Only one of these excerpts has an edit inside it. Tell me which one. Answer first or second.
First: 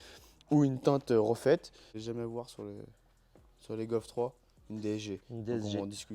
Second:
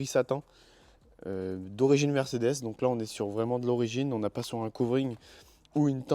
first